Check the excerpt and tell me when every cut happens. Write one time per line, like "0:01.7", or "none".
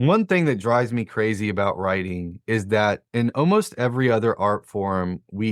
0:03.0